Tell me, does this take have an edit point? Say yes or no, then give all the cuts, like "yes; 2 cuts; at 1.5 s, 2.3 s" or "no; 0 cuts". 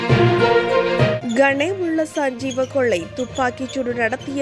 yes; 1 cut; at 1.2 s